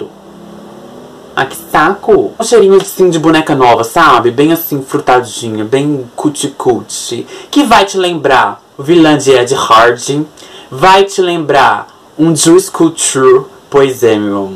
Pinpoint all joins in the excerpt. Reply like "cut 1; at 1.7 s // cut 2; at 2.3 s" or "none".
cut 1; at 2.4 s

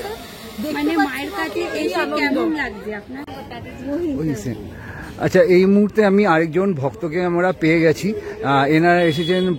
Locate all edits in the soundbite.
cut 1; at 3.1 s

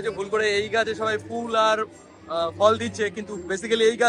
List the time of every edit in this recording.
none

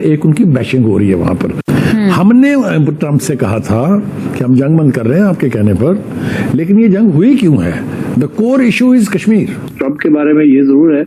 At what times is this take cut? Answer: cut 1; at 1.7 s // cut 2; at 9.7 s

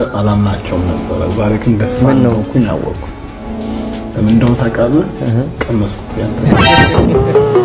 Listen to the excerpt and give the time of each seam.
none

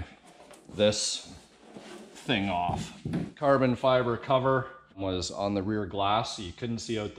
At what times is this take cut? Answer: cut 1; at 3.3 s // cut 2; at 5.0 s

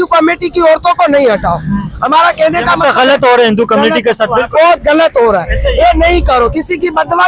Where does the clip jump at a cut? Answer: none

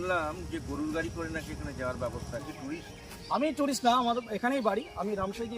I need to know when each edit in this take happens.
cut 1; at 2.4 s

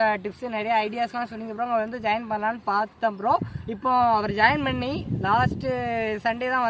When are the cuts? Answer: none

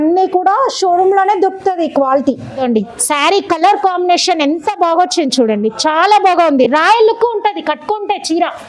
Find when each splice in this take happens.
cut 1; at 2.6 s

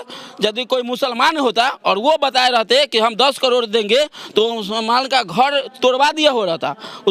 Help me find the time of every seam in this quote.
none

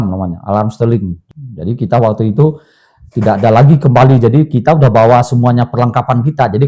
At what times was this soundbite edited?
cut 1; at 1.2 s

